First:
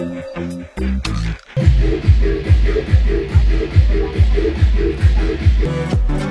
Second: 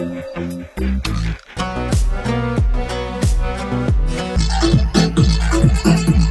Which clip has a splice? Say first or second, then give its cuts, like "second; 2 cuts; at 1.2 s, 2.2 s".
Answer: second; 2 cuts; at 1.4 s, 4.4 s